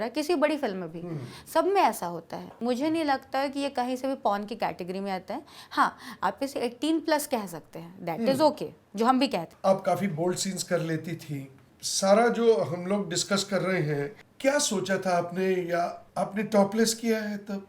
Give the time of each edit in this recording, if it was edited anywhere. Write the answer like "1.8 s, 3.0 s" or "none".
2.5 s, 9.5 s